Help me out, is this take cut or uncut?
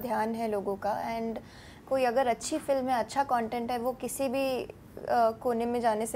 uncut